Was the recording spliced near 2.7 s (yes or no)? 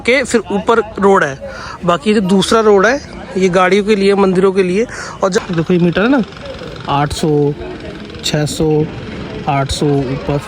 no